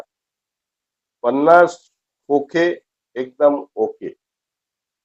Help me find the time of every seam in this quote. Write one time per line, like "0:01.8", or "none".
none